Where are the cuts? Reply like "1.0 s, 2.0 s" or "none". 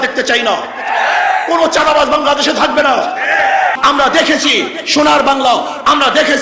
3.8 s